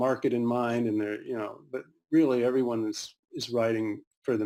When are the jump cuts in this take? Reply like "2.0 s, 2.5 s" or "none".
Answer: none